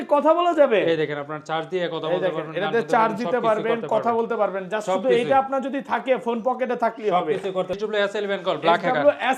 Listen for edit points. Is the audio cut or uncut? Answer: cut